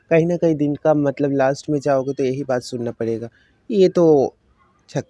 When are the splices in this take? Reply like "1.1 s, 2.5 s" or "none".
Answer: none

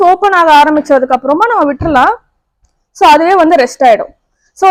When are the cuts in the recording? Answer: none

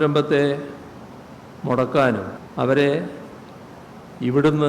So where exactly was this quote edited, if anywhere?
2.4 s

